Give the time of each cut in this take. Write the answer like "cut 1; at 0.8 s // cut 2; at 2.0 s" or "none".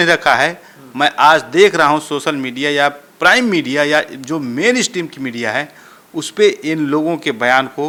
none